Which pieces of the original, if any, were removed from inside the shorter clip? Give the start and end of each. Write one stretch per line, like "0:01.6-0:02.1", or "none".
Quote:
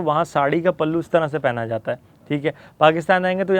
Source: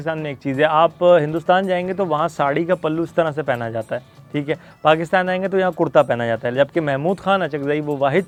none